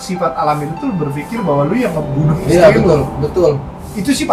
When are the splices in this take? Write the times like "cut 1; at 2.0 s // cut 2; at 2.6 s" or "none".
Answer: none